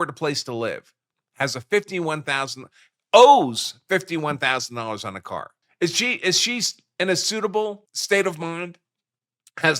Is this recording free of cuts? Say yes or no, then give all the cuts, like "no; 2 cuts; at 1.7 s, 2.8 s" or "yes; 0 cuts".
no; 2 cuts; at 5.6 s, 7.9 s